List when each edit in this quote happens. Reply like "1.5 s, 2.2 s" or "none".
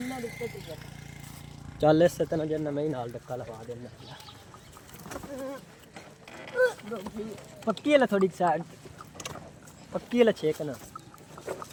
none